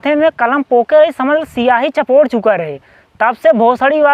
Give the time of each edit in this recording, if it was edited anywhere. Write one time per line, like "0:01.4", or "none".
none